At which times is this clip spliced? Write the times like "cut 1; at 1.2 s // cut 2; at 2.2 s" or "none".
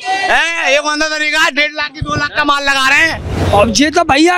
cut 1; at 3.3 s